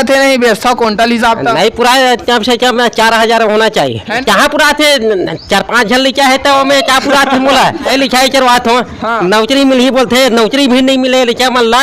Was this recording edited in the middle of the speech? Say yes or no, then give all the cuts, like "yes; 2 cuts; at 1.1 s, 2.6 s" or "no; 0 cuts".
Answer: yes; 2 cuts; at 4.2 s, 7.9 s